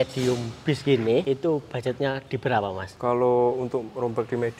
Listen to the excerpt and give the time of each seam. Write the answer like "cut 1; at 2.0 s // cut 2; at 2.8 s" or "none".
cut 1; at 1.2 s // cut 2; at 2.9 s